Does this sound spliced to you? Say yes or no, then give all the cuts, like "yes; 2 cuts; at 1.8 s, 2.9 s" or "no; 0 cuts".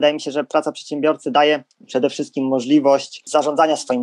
yes; 2 cuts; at 1.7 s, 3.2 s